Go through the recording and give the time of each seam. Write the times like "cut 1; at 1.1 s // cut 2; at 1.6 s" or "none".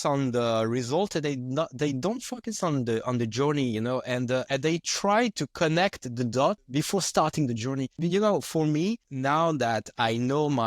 cut 1; at 4.5 s // cut 2; at 6.6 s // cut 3; at 8.0 s // cut 4; at 9.1 s